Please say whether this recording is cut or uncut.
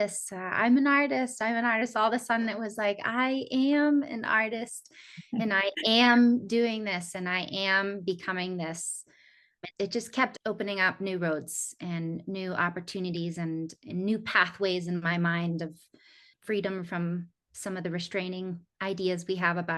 uncut